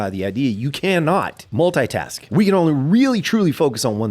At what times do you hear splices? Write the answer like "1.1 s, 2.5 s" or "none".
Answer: 1.4 s, 2.2 s